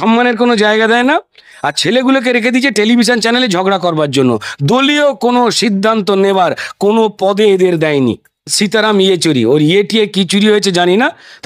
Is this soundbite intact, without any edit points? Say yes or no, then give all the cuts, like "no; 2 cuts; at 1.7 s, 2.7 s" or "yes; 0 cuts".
no; 1 cut; at 8.5 s